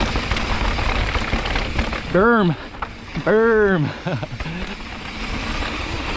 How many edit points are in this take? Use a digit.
0